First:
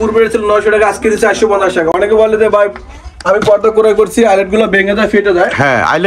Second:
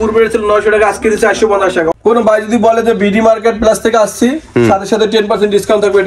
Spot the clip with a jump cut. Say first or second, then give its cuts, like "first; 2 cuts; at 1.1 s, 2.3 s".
second; 1 cut; at 2.0 s